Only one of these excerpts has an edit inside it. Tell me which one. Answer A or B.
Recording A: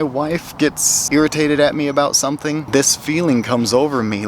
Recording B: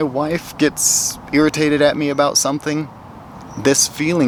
A